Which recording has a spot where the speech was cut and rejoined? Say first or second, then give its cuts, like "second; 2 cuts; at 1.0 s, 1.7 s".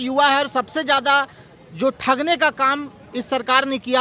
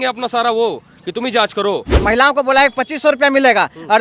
second; 1 cut; at 1.9 s